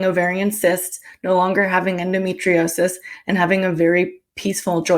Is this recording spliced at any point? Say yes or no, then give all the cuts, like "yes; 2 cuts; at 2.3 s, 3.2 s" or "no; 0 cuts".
no; 0 cuts